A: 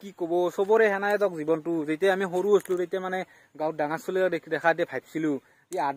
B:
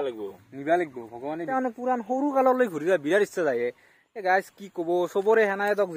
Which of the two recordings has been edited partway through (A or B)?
B